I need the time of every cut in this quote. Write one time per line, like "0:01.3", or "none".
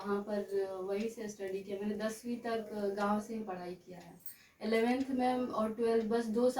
none